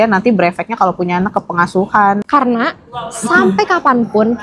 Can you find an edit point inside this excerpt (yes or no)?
yes